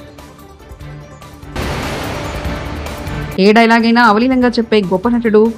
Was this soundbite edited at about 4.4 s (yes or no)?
no